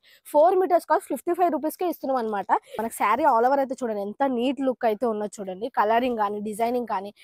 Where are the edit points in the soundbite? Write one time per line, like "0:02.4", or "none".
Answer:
0:02.8